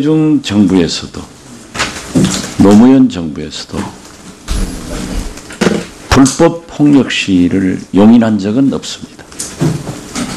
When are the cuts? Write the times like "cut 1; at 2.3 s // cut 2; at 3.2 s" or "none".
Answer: none